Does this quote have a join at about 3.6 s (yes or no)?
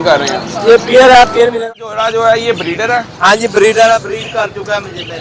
no